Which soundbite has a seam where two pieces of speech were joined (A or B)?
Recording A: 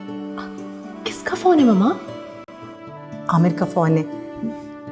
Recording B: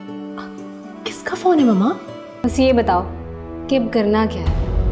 B